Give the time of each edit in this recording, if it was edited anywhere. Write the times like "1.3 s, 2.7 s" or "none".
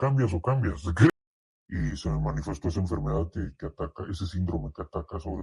1.1 s